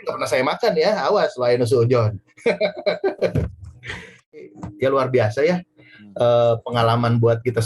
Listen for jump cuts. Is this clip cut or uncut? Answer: cut